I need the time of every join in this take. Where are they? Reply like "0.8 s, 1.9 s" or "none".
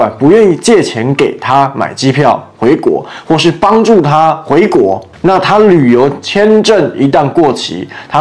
none

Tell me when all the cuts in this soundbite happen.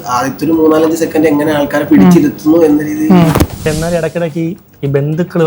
3.6 s

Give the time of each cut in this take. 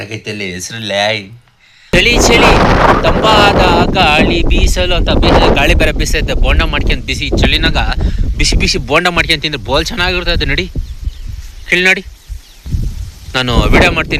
1.9 s

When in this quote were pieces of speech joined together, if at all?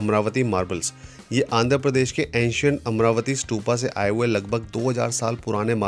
none

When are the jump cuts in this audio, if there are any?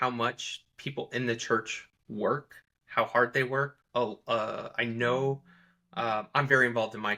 none

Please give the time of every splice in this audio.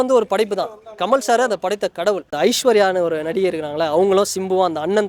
2.3 s

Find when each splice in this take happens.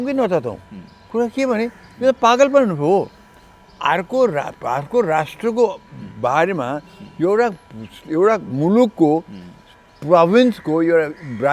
none

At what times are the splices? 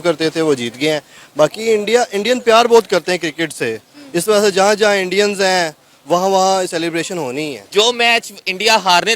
7.6 s

